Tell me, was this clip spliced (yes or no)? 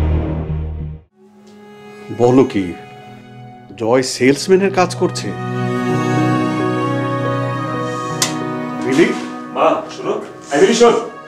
yes